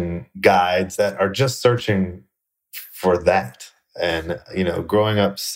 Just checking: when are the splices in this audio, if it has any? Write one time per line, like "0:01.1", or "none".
none